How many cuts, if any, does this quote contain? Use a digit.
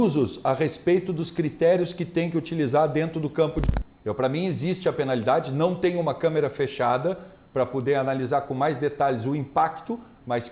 1